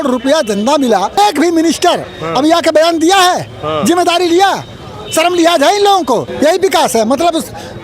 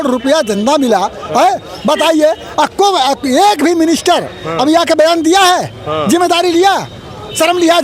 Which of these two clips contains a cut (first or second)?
first